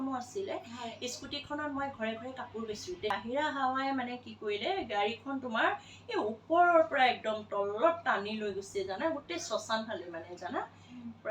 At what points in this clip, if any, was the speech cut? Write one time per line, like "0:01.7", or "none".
0:03.1

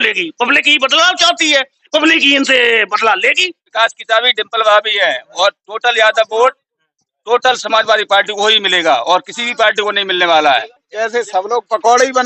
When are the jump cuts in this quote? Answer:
0:03.7
0:10.8

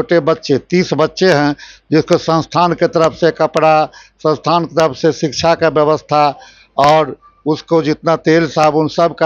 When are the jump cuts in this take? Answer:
none

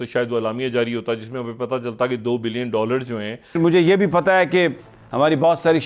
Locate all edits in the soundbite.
0:03.6

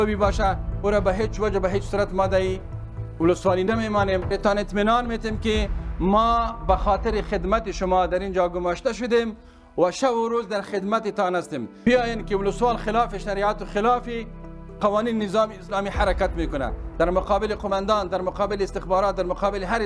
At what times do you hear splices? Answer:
0:04.3
0:11.9

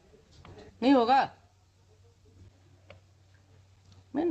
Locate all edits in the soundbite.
0:02.5

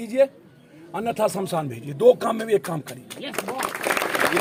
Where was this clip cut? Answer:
none

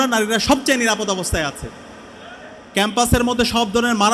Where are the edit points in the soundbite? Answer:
none

